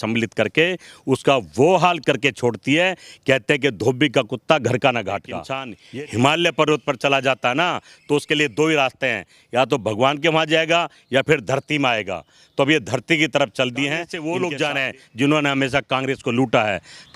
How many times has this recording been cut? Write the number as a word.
two